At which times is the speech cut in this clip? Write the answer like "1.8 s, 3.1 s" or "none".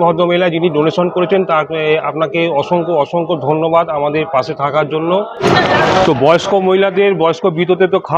5.4 s